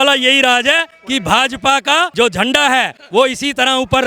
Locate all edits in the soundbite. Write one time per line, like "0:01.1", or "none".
0:00.9
0:02.1
0:03.0